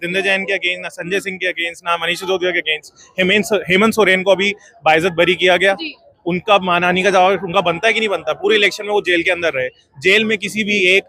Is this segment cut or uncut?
uncut